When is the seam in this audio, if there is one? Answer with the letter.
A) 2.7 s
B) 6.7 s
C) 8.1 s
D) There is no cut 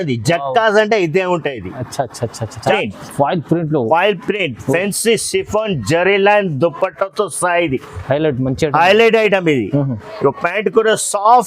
A